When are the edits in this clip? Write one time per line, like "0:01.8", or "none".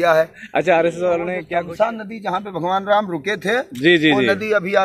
0:01.4